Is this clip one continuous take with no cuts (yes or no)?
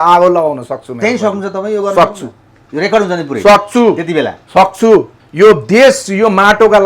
no